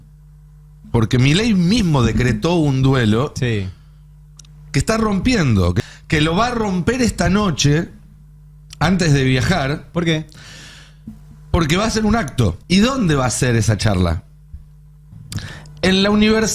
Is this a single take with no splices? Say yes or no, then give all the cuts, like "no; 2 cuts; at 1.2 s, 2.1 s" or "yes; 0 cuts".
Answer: no; 2 cuts; at 5.8 s, 12.6 s